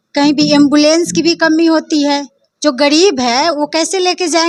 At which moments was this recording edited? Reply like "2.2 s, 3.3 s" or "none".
none